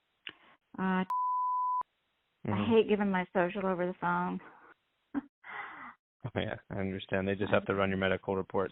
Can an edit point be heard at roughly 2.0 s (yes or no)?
no